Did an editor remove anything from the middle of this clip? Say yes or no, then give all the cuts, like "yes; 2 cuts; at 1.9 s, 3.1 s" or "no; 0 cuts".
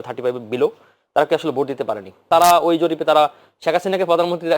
yes; 1 cut; at 2.3 s